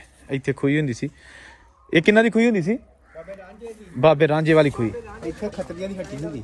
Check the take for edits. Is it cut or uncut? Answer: cut